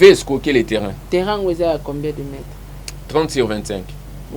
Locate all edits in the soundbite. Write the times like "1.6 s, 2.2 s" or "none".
1.0 s